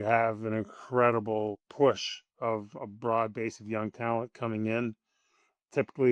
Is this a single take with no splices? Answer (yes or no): no